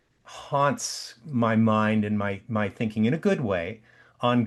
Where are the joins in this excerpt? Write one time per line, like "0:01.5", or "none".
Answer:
none